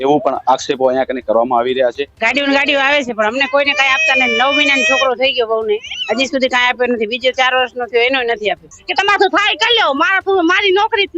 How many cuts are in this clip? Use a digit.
2